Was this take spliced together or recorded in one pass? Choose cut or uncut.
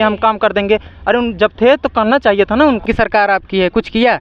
cut